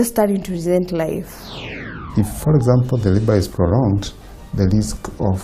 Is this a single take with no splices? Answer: no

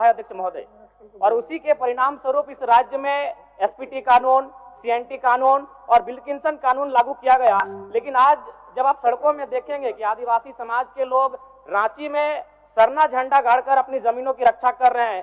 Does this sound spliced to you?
no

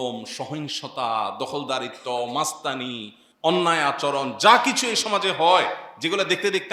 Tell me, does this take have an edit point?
no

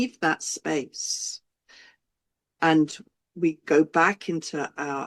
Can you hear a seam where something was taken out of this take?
no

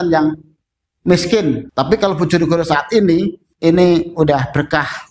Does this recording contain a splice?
yes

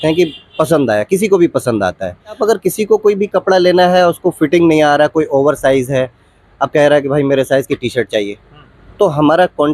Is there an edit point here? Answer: yes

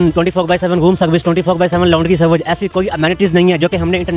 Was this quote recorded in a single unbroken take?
yes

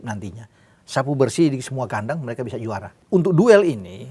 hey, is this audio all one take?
no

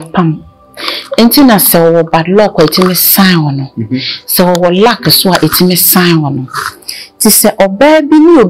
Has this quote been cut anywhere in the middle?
no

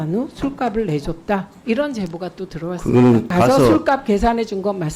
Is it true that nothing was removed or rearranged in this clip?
no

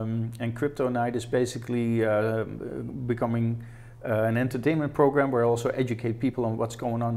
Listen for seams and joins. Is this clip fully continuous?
yes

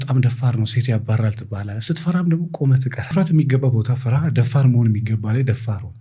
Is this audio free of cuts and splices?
yes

